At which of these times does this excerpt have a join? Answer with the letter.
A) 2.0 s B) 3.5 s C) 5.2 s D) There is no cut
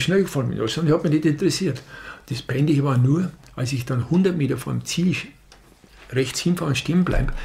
D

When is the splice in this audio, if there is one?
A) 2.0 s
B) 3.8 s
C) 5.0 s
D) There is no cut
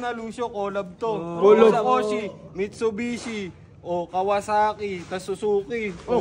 D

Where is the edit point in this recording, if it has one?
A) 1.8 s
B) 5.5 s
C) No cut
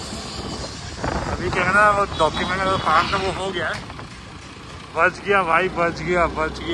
B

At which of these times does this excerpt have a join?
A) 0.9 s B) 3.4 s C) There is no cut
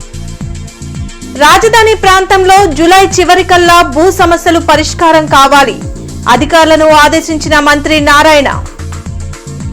A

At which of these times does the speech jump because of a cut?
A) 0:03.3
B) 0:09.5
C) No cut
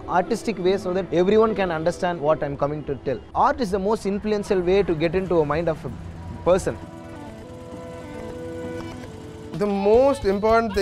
B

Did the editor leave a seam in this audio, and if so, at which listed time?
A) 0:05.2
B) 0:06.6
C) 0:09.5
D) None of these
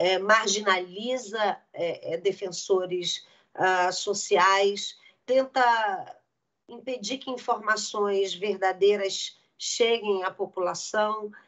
A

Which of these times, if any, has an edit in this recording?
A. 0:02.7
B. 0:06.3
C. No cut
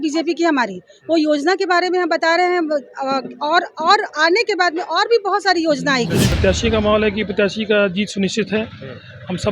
B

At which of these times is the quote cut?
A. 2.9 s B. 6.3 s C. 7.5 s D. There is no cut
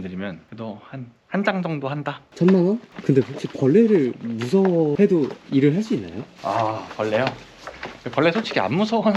A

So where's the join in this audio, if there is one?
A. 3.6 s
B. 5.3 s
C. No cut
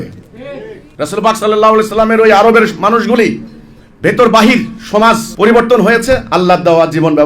C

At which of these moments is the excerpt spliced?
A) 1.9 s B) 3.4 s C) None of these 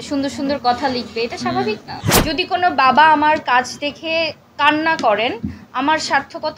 A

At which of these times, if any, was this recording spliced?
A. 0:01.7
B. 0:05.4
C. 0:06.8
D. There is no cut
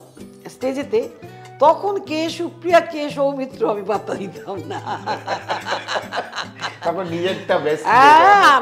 D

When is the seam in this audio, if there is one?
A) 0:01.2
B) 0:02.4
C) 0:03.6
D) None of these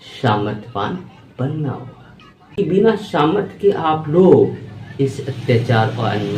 B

